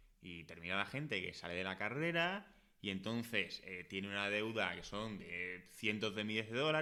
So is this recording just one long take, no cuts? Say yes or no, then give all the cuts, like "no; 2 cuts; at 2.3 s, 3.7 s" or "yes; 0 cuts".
yes; 0 cuts